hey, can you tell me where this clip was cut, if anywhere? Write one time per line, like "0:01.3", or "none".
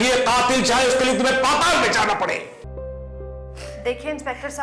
0:02.6